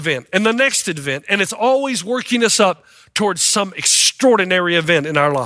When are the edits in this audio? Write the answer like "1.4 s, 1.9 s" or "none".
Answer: none

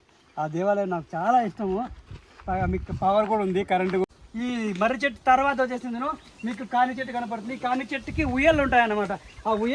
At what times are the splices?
4.0 s

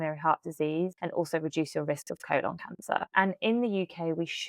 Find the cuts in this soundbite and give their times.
1.0 s, 3.1 s

